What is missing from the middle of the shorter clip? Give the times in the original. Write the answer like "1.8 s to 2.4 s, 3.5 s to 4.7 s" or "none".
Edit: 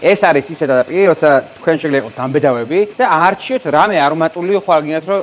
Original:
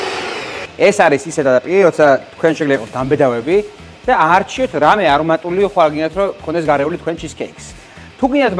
3.7 s to 4.0 s